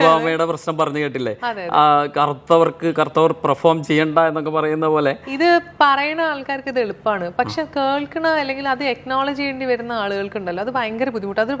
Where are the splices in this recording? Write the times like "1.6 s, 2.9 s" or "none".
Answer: none